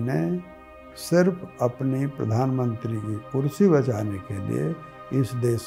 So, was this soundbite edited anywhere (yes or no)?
no